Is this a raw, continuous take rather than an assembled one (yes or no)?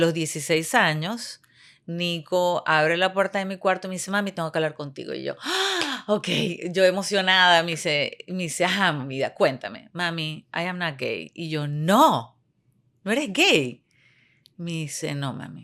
yes